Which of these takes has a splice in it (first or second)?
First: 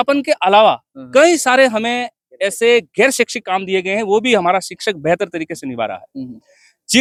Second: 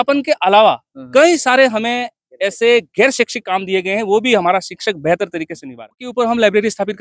second